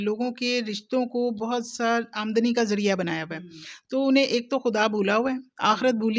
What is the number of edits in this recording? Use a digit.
0